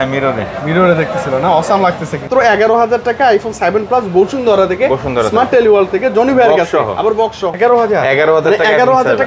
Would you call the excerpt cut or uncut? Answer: cut